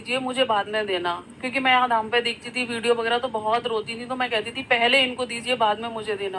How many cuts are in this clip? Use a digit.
0